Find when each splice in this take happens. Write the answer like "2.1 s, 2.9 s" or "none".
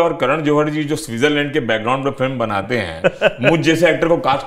none